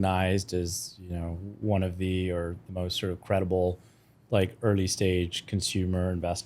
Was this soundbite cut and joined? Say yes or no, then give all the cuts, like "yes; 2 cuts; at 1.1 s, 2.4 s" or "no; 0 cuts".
no; 0 cuts